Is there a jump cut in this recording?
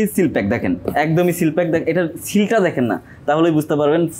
no; 0 cuts

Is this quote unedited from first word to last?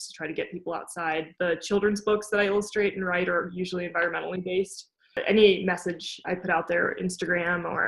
no; 1 cut; at 5.2 s

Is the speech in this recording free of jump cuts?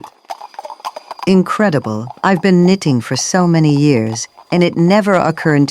no; 1 cut; at 1.1 s

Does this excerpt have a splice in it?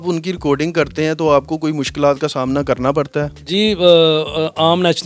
no; 0 cuts

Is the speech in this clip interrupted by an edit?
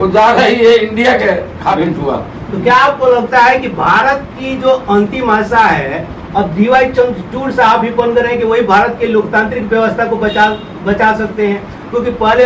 yes; 1 cut; at 1.8 s

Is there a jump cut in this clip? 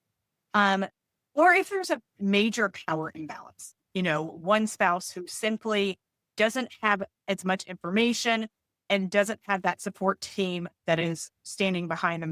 no; 0 cuts

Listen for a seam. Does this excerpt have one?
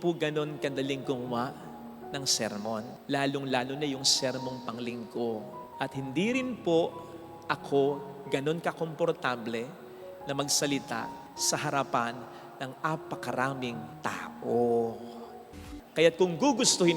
yes; 1 cut; at 15.6 s

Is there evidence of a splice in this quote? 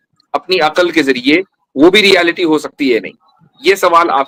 no; 0 cuts

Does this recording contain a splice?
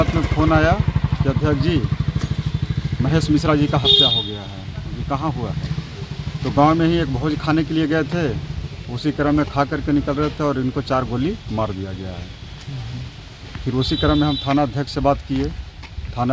no; 0 cuts

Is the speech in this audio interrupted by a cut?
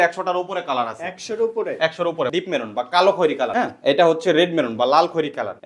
yes; 1 cut; at 2.3 s

